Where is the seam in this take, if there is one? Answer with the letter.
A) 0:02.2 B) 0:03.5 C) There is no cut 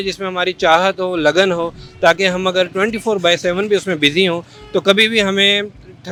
C